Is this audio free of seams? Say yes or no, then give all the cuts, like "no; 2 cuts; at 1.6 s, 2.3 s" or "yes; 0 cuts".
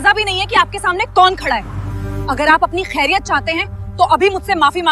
yes; 0 cuts